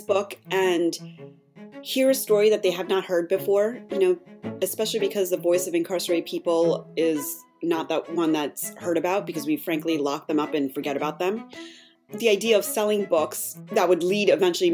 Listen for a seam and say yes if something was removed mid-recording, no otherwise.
yes